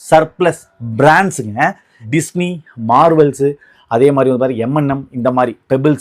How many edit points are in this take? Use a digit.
1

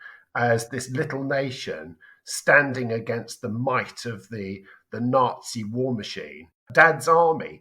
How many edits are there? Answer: 1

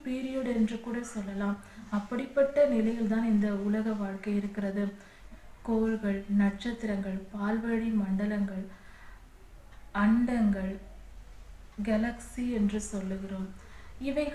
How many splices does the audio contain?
1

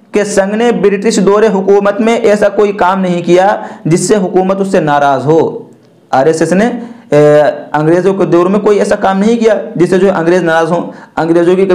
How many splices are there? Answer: 0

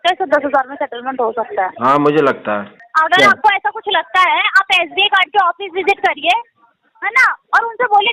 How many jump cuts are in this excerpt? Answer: 1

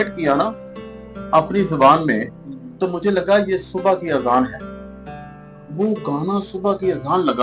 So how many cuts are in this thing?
0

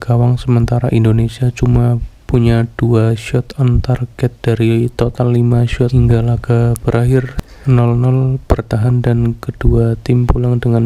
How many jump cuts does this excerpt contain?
2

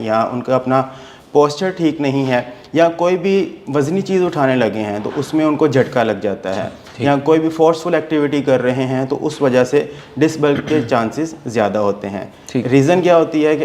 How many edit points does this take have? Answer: 0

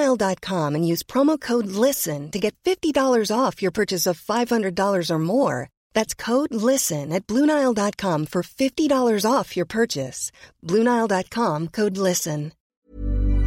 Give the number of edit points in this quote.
1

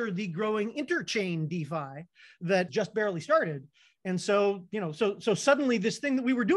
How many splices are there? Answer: 1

